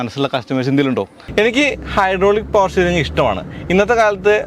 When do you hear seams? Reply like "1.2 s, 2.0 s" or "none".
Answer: 1.2 s